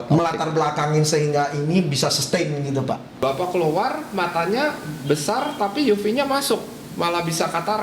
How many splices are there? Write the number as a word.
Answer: one